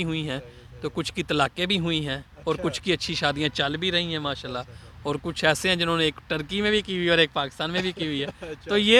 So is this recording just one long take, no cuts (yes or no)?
yes